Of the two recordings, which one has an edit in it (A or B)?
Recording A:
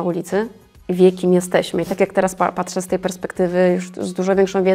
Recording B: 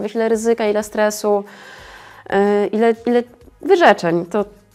A